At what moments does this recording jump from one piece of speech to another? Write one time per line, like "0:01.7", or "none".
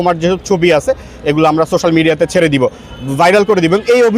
none